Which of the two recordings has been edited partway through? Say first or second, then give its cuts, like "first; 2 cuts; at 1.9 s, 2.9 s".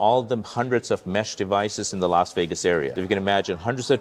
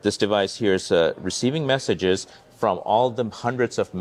first; 1 cut; at 3.0 s